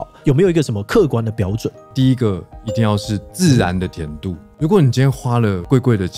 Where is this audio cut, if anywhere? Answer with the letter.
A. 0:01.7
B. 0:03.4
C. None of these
A